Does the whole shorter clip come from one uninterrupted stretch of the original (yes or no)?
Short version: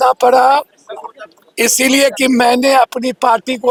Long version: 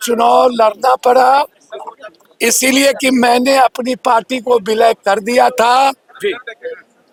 yes